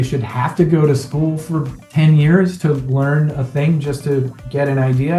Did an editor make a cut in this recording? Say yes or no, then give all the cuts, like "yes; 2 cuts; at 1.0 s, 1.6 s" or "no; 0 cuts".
no; 0 cuts